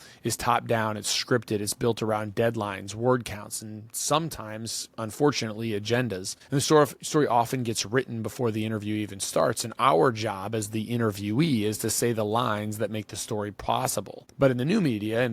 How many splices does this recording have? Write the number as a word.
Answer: two